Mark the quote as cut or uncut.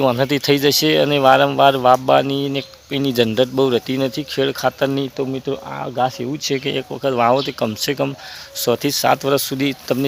uncut